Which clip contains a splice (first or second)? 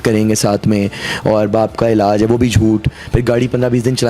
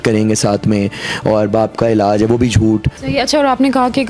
second